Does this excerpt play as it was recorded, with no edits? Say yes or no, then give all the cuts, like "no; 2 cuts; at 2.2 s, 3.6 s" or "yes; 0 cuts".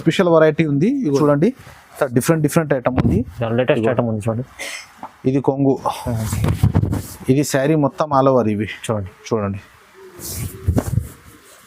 no; 1 cut; at 1.2 s